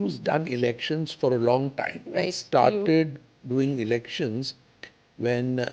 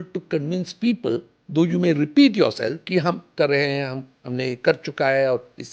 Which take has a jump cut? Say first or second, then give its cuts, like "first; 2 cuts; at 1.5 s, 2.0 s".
second; 1 cut; at 3.2 s